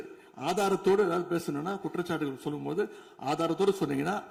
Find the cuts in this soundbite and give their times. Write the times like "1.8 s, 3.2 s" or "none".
none